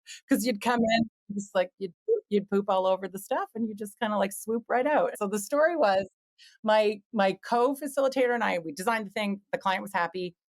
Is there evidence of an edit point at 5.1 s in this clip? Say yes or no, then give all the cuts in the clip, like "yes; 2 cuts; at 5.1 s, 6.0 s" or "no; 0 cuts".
yes; 1 cut; at 5.1 s